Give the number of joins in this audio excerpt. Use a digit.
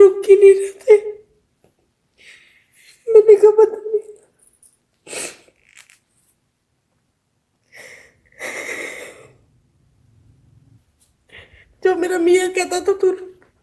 1